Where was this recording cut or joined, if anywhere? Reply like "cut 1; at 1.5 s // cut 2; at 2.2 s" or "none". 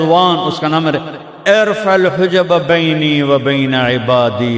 none